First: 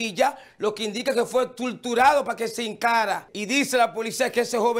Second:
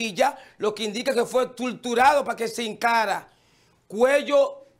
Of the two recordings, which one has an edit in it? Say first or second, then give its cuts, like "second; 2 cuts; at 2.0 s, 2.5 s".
first; 1 cut; at 3.3 s